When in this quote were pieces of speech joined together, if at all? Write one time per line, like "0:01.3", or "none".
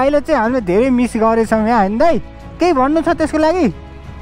none